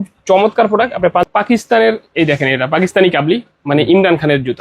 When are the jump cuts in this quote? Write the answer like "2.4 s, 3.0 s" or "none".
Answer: 1.2 s